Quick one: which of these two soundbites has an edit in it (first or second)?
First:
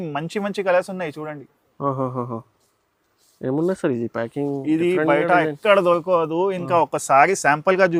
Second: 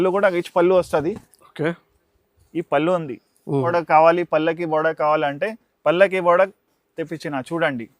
second